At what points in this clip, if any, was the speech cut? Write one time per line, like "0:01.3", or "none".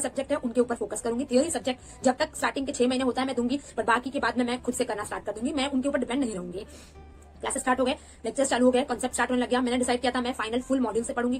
none